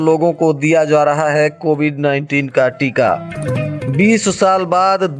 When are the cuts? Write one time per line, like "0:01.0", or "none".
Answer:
none